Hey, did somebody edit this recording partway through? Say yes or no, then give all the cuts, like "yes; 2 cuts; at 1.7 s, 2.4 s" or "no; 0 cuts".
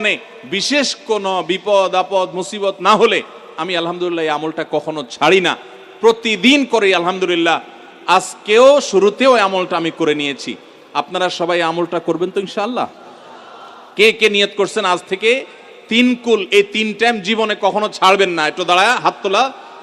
no; 0 cuts